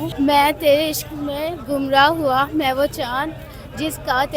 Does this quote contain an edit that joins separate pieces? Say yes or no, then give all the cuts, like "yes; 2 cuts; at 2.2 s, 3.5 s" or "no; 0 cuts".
no; 0 cuts